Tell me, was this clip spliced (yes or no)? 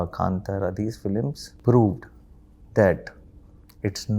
yes